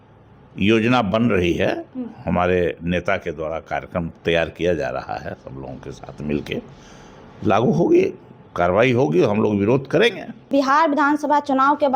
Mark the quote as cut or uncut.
uncut